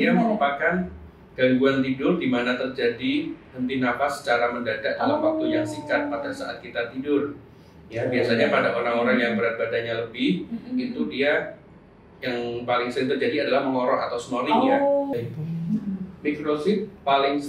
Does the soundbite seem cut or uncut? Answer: cut